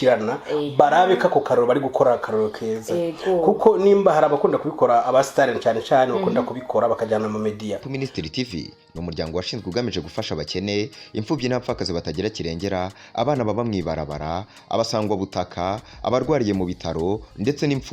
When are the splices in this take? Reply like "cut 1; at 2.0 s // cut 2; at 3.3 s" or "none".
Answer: cut 1; at 7.9 s